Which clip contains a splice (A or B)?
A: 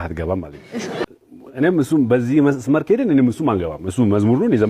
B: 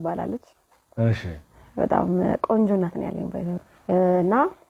A